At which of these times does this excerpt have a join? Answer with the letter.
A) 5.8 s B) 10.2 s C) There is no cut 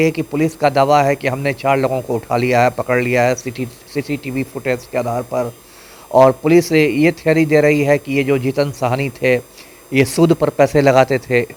C